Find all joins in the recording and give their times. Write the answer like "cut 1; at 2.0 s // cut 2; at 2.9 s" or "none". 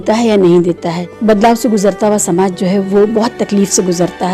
cut 1; at 1.1 s